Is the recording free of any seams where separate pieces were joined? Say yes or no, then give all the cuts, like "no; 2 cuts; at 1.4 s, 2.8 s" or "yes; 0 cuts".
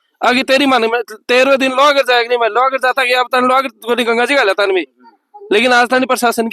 yes; 0 cuts